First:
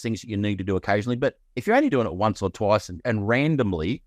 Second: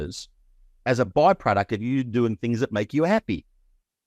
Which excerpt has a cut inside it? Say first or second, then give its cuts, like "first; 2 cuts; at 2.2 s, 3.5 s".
first; 1 cut; at 3.0 s